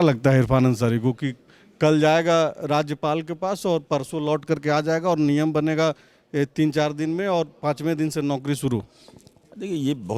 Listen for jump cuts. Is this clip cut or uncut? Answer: uncut